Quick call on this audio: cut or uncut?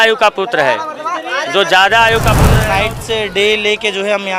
cut